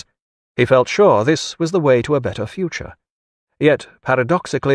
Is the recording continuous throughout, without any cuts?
no; 1 cut; at 2.4 s

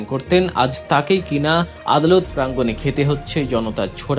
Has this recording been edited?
yes; 1 cut; at 1.8 s

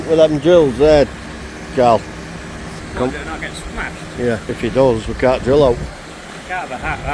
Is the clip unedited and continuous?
no; 1 cut; at 4.4 s

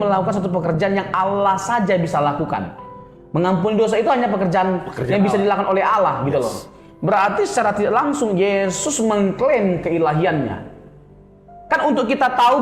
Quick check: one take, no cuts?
yes; 0 cuts

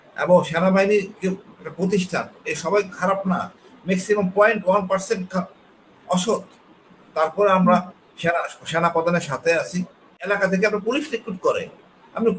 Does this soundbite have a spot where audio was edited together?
yes; 1 cut; at 10.3 s

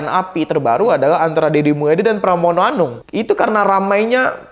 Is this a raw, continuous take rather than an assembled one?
no; 1 cut; at 3.0 s

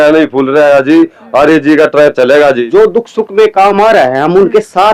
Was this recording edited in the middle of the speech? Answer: yes; 1 cut; at 2.6 s

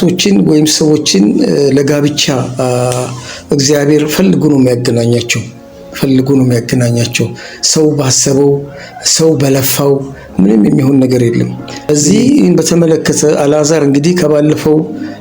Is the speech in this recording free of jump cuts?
no; 1 cut; at 11.9 s

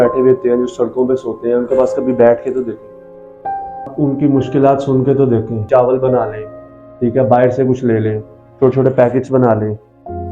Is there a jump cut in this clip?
yes; 2 cuts; at 3.9 s, 5.7 s

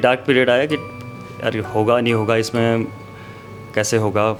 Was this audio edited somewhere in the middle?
no; 0 cuts

